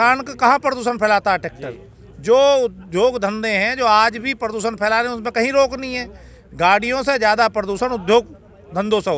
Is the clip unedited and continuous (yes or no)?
yes